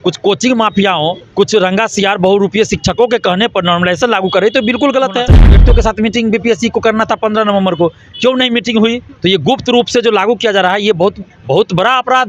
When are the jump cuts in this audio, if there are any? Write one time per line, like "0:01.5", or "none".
0:01.2
0:05.6
0:09.1
0:11.3